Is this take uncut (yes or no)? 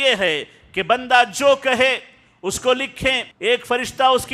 no